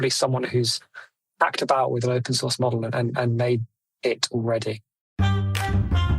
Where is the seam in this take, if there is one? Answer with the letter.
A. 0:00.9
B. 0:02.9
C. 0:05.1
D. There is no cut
C